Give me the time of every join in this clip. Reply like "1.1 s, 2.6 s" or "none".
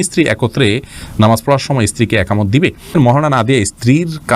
2.9 s